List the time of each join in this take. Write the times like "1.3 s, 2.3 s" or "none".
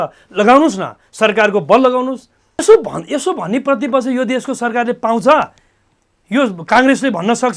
2.6 s